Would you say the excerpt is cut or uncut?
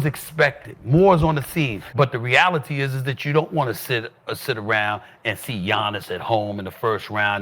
cut